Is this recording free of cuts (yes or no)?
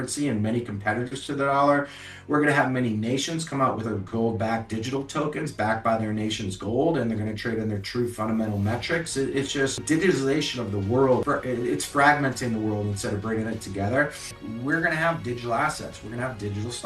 no